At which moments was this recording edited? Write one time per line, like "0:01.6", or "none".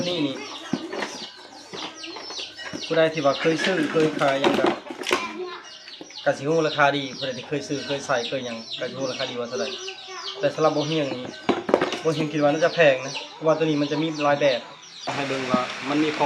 0:15.2